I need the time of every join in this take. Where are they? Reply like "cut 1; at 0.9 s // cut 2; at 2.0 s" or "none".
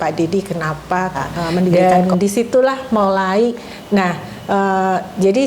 cut 1; at 1.7 s